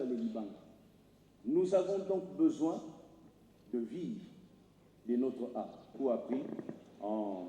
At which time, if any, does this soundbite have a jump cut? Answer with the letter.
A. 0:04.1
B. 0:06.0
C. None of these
B